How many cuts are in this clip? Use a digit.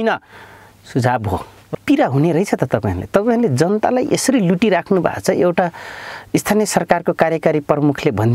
1